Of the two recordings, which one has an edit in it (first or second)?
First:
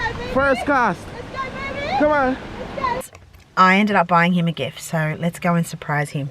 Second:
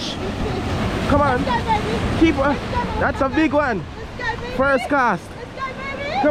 first